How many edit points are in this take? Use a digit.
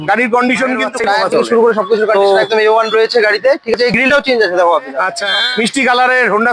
2